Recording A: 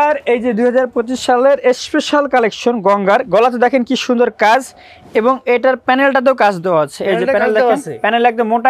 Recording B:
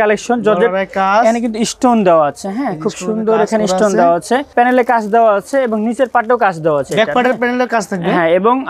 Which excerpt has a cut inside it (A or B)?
B